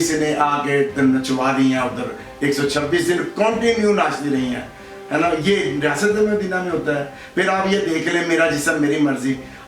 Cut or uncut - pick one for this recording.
uncut